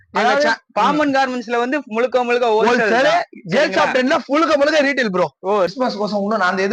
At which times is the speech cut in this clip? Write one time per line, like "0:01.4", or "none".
0:05.7